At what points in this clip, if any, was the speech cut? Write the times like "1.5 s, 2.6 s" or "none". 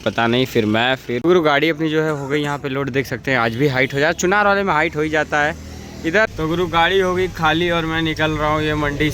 1.1 s, 6.3 s